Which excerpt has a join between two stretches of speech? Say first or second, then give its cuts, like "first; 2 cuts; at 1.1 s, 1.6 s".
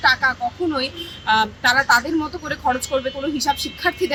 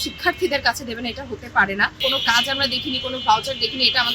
second; 1 cut; at 1.9 s